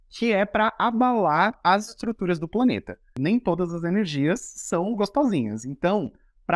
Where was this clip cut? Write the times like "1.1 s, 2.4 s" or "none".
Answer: 3.2 s